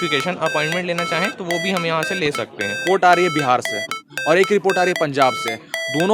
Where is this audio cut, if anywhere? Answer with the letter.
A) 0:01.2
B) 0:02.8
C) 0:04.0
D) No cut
B